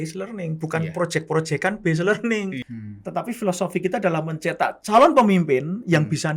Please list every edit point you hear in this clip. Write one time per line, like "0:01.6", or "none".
0:02.6